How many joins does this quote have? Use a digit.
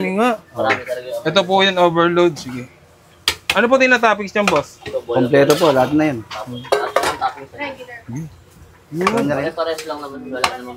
0